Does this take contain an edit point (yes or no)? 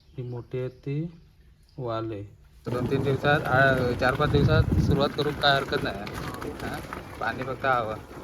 yes